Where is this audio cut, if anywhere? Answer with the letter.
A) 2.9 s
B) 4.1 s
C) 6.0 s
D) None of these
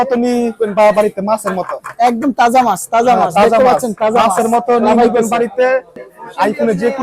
C